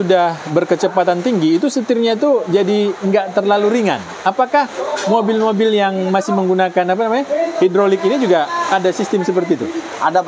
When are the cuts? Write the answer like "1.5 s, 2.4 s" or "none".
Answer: none